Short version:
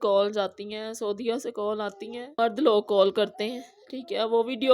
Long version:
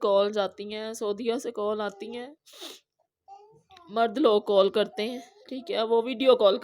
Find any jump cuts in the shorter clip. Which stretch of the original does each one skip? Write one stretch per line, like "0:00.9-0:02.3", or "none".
0:02.3-0:03.9